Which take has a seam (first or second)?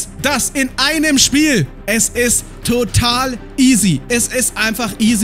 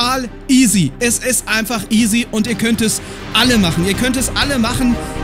first